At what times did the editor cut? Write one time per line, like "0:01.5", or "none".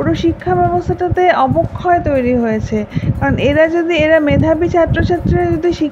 none